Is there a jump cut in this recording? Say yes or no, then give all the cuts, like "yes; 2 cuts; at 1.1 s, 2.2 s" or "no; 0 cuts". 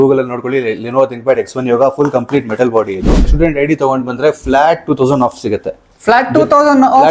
yes; 1 cut; at 3.3 s